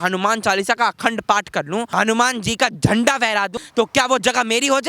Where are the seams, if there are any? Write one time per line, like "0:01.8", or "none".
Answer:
0:01.9
0:03.6